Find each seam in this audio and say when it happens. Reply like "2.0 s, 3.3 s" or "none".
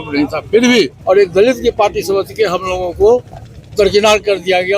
1.0 s